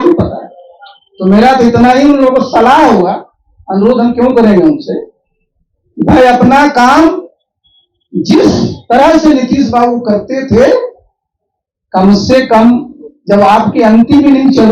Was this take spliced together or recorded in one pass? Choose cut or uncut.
uncut